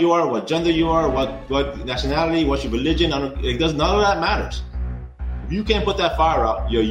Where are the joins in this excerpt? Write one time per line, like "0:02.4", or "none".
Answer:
none